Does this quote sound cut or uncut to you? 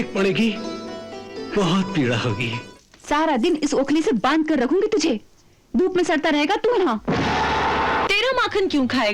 cut